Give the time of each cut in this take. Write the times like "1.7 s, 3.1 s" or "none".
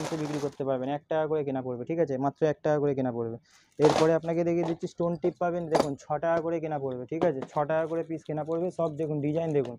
none